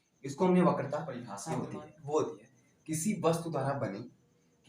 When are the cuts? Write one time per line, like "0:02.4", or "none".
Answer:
0:01.3

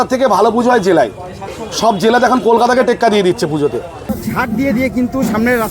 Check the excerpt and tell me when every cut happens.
0:04.1

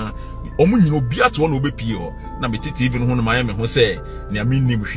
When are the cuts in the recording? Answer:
none

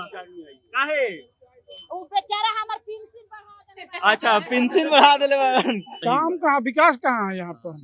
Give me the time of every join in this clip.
0:05.9

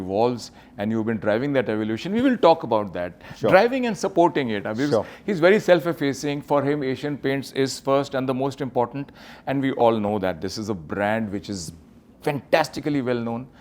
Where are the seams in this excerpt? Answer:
none

